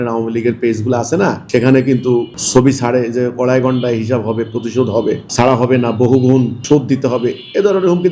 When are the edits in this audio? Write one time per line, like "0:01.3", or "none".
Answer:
none

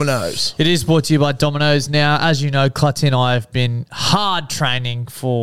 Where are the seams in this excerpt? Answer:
none

